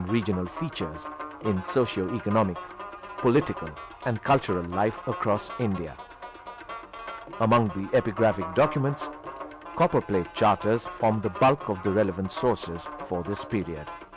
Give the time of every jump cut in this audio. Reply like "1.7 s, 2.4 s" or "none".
none